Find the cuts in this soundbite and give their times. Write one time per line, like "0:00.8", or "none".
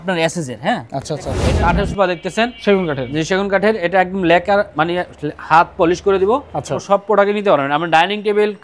0:01.4
0:06.8